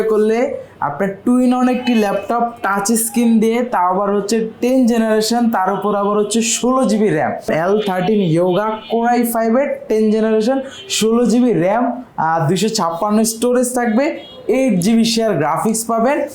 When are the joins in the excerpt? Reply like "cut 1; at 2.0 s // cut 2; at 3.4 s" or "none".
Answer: cut 1; at 7.5 s

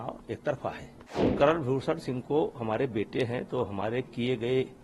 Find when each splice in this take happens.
cut 1; at 1.3 s

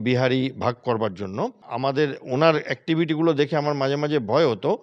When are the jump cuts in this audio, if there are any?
cut 1; at 1.6 s

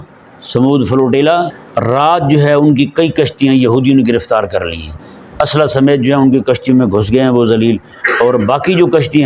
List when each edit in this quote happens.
cut 1; at 1.6 s

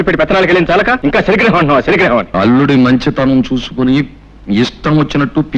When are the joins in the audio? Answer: cut 1; at 1.0 s // cut 2; at 2.3 s

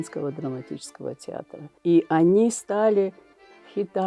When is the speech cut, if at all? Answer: cut 1; at 1.6 s

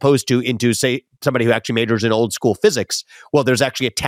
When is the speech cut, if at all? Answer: none

